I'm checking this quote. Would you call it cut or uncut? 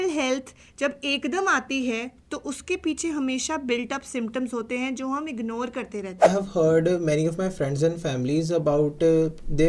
cut